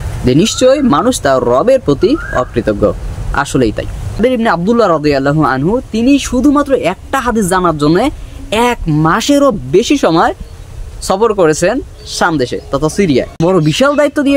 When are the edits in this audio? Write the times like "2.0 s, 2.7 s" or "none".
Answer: 4.2 s, 13.4 s

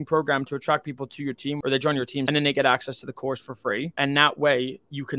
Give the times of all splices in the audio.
1.9 s, 3.9 s

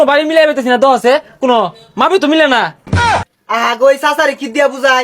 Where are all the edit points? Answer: 3.1 s

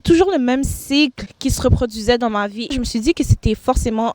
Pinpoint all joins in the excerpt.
1.3 s, 2.7 s

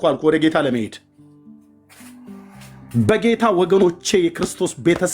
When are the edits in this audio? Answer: none

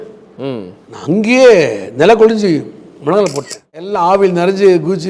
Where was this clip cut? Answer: 3.9 s

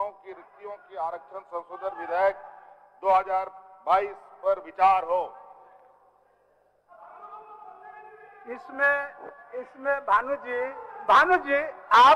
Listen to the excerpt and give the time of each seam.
none

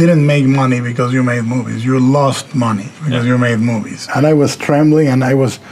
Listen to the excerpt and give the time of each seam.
4.1 s

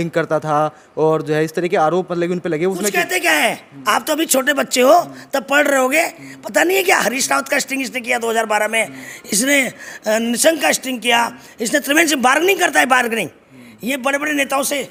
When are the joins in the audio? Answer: none

